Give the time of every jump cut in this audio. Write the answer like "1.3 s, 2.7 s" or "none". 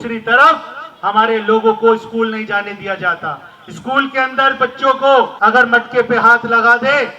5.3 s